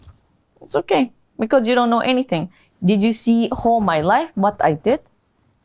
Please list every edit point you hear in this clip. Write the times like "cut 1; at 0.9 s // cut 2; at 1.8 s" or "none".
none